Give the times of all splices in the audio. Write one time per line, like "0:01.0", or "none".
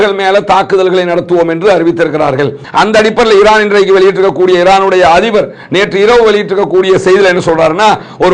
0:02.6